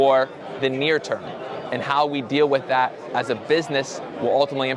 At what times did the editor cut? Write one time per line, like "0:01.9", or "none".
none